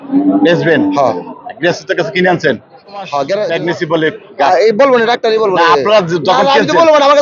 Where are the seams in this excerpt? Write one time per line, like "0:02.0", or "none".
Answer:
0:03.5